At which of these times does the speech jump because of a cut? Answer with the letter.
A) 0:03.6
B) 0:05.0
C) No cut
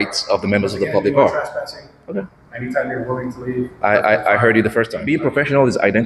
B